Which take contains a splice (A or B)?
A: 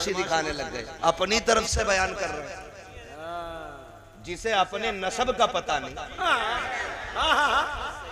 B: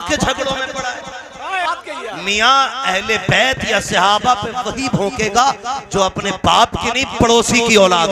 B